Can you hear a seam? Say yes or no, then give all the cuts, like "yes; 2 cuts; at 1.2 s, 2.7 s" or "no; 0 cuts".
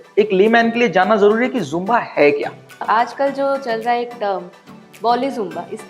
yes; 1 cut; at 2.8 s